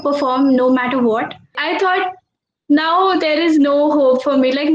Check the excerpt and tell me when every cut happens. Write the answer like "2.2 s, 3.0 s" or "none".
1.6 s